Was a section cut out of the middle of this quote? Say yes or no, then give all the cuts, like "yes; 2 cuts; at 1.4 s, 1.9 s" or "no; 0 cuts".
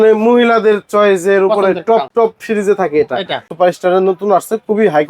yes; 2 cuts; at 2.1 s, 3.4 s